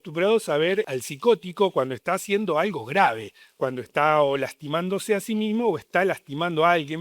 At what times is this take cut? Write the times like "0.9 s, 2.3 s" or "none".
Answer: 0.9 s